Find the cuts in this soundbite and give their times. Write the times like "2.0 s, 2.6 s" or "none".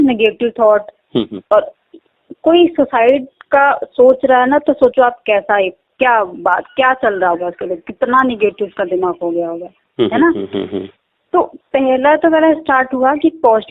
none